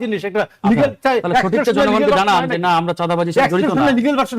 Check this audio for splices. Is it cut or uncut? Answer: uncut